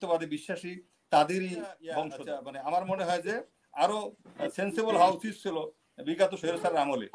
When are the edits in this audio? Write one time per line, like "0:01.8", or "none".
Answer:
0:02.2